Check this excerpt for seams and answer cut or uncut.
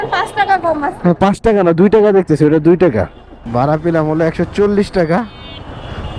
cut